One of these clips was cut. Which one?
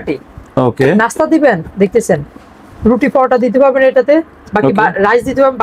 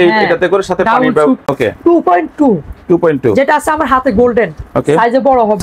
second; 1 cut; at 1.4 s

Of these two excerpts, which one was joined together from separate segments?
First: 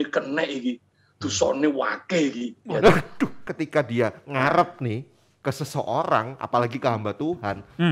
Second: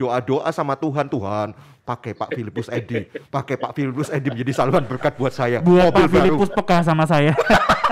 first; 1 cut; at 3.5 s

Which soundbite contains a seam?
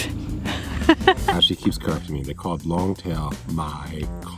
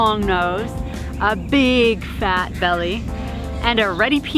first; 1 cut; at 1.3 s

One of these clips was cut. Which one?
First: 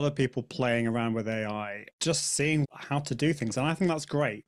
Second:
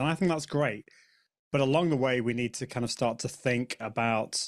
first; 2 cuts; at 1.8 s, 2.7 s

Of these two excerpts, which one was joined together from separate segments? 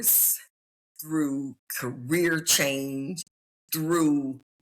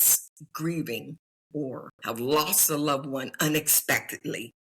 second; 1 cut; at 1.9 s

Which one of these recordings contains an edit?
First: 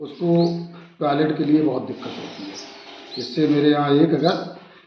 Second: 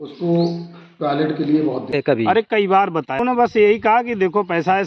second; 2 cuts; at 1.9 s, 3.2 s

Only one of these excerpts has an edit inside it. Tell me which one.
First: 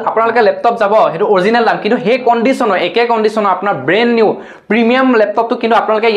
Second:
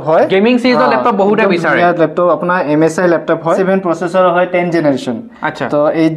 second; 1 cut; at 3.6 s

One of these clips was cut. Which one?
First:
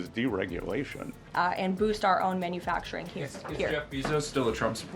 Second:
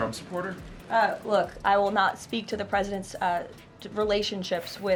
first; 1 cut; at 1.1 s

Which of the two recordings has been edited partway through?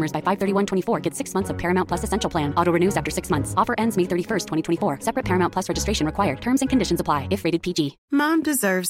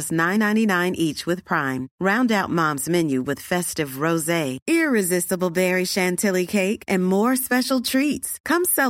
first; 1 cut; at 8.0 s

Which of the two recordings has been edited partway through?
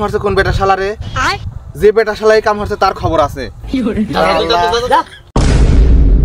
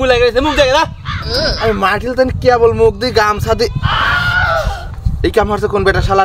first; 1 cut; at 5.3 s

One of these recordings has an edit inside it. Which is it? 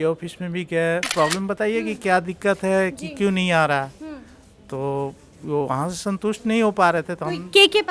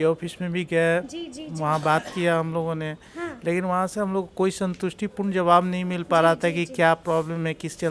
first; 1 cut; at 1.1 s

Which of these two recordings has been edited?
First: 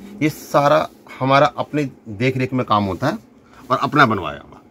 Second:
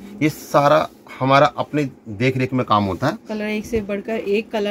second; 1 cut; at 3.2 s

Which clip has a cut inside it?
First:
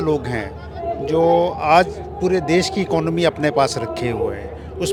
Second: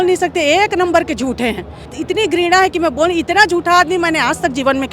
second; 1 cut; at 1.9 s

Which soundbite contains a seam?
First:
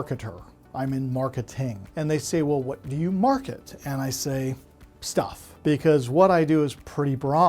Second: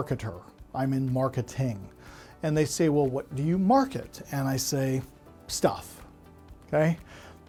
first; 2 cuts; at 1.8 s, 5.4 s

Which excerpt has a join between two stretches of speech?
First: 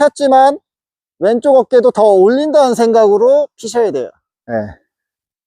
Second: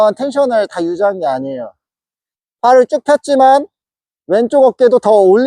first; 1 cut; at 4.3 s

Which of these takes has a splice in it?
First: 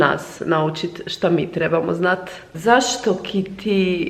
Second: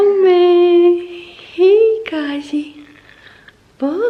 first; 1 cut; at 2.4 s

